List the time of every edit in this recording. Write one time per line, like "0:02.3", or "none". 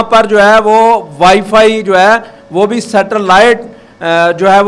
none